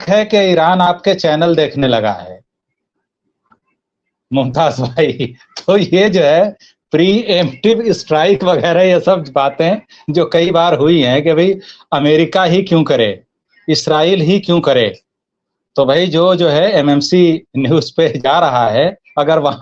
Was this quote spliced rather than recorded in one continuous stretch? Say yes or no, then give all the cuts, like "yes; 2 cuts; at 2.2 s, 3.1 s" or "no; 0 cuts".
no; 0 cuts